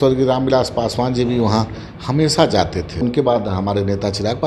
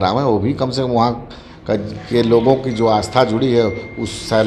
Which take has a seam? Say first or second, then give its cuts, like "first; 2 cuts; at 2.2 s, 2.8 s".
first; 1 cut; at 3.0 s